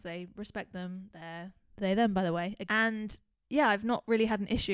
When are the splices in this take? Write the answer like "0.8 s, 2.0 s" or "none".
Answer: 2.6 s

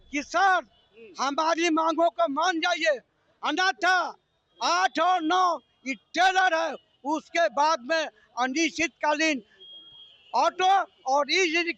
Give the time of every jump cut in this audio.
none

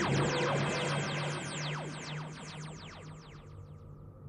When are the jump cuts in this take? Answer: 3.2 s

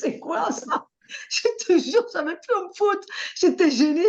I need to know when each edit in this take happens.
none

